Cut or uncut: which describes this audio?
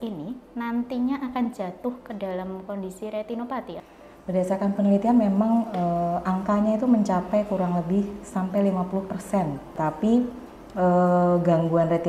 cut